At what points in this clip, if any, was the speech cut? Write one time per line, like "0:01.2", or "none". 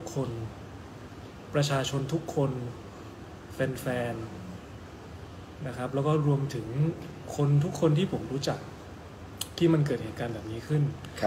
none

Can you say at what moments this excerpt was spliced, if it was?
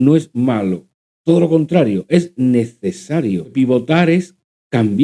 0:03.5

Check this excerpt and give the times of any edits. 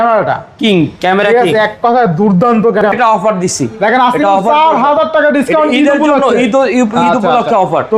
0:02.9

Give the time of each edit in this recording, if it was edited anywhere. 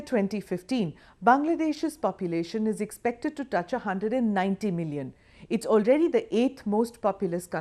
0:02.5

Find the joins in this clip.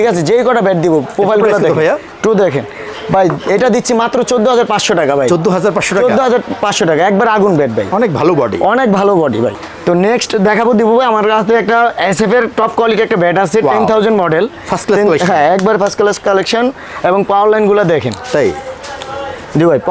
0:09.7

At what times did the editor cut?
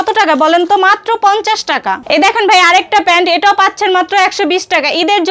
0:02.0

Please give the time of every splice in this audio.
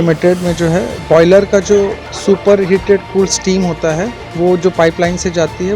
0:00.9
0:02.1
0:04.2

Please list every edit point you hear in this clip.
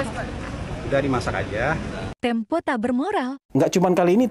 0:02.0

